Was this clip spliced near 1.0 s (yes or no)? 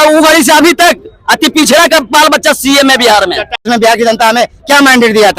no